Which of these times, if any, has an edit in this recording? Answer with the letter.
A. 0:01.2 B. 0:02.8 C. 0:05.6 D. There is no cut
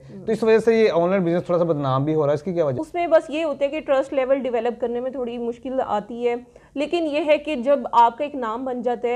B